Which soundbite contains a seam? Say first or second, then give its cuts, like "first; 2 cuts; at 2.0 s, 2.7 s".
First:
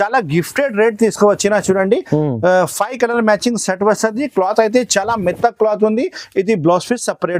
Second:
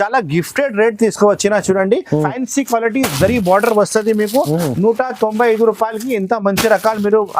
second; 1 cut; at 2.3 s